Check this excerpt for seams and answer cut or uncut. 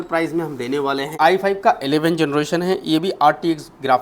cut